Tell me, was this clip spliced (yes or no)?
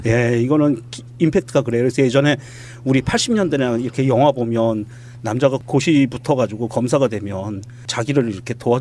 yes